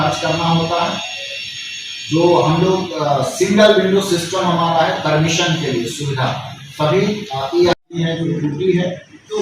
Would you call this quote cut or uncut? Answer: cut